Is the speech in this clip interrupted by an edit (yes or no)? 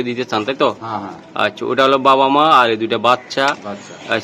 no